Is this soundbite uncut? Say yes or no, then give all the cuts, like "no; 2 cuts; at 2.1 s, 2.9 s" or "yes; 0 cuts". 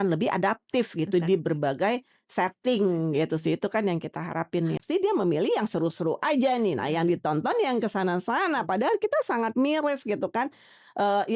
no; 1 cut; at 4.8 s